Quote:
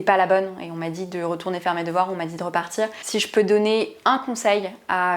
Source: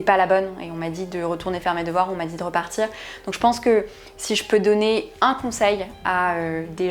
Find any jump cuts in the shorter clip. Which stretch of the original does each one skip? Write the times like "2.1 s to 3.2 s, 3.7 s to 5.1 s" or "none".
3.0 s to 4.2 s